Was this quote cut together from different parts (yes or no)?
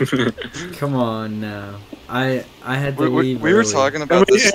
no